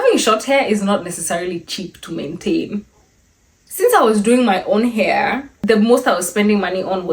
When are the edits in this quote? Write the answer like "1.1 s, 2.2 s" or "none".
3.7 s, 5.5 s